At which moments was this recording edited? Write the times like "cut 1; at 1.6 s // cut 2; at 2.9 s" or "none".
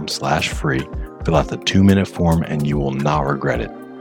none